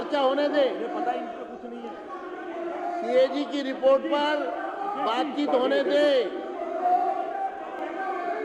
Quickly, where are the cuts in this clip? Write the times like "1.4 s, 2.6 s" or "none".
none